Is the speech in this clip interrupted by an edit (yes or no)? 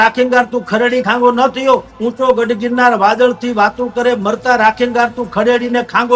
no